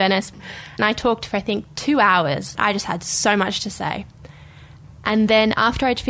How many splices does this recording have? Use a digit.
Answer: 2